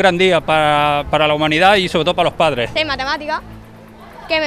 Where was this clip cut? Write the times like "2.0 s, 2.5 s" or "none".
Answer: 2.7 s

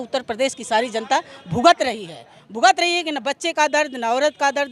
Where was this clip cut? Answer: none

